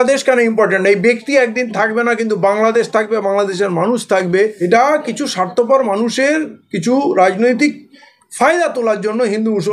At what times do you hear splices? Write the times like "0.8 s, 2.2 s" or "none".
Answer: 4.6 s